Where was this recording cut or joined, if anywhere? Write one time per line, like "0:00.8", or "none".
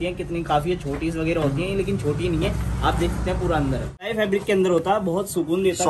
0:04.1